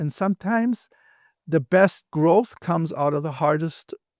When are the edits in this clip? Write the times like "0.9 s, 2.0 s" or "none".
none